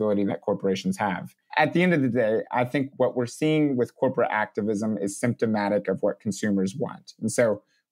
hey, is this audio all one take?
no; 2 cuts; at 1.4 s, 2.9 s

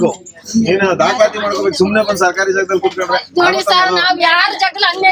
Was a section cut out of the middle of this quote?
no; 0 cuts

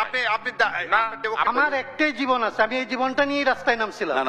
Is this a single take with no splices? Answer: no; 1 cut; at 1.5 s

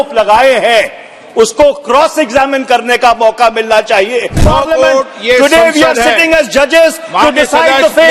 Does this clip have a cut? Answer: yes; 1 cut; at 4.4 s

